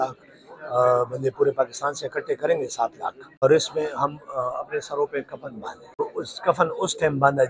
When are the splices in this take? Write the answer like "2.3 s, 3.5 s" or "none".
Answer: 3.4 s, 6.0 s